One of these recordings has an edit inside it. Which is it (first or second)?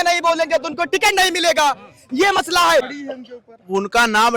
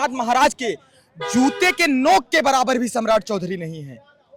first